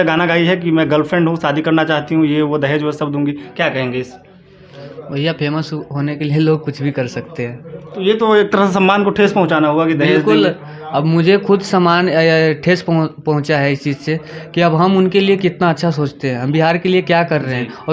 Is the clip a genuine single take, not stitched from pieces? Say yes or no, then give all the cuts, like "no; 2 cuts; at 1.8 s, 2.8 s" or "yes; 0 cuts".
yes; 0 cuts